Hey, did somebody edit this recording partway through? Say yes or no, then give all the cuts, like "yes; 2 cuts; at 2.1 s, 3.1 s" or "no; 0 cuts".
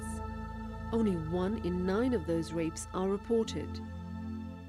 no; 0 cuts